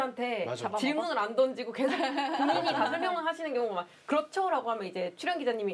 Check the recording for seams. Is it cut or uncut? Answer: uncut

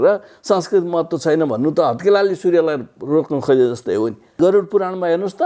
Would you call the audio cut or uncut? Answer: cut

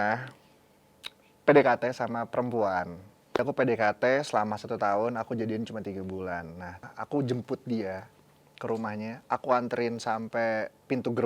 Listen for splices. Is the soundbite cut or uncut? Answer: cut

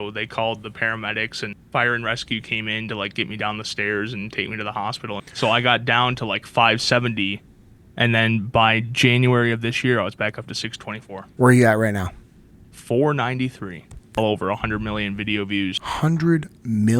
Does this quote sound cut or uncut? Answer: cut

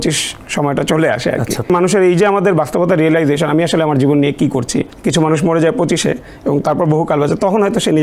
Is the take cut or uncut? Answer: cut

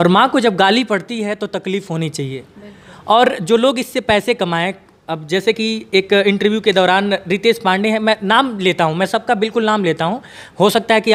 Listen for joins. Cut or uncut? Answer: uncut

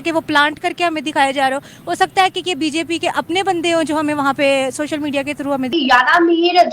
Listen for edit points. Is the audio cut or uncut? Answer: cut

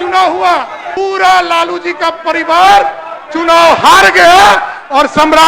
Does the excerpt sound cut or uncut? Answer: cut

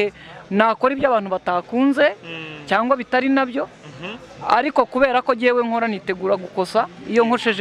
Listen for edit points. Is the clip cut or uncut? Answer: uncut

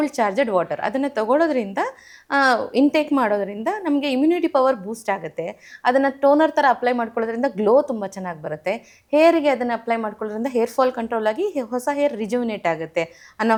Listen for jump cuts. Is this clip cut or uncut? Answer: uncut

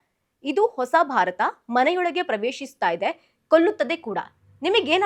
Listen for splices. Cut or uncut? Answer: uncut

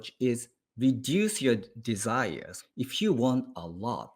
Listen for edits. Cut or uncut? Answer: cut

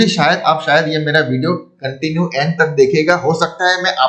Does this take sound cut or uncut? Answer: uncut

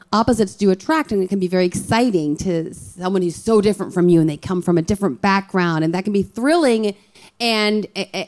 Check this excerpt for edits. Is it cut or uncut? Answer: uncut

